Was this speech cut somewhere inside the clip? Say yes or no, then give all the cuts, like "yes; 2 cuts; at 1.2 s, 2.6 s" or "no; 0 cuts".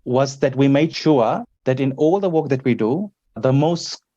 yes; 3 cuts; at 1.0 s, 1.5 s, 3.4 s